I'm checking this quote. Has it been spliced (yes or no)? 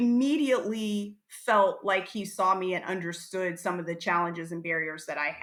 no